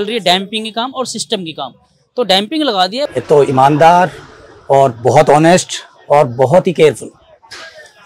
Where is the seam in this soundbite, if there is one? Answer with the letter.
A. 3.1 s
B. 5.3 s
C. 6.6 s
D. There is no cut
A